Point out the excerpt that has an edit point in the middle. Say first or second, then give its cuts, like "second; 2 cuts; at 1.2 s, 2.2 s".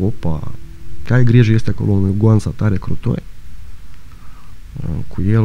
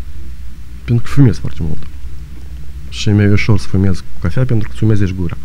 first; 1 cut; at 1.0 s